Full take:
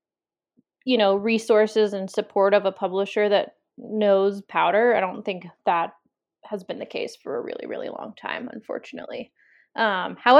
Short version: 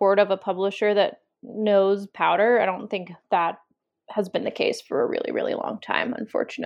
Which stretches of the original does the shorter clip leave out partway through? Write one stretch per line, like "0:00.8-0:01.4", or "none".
none